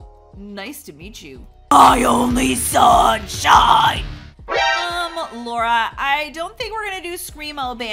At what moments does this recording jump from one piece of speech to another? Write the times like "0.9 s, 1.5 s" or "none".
1.7 s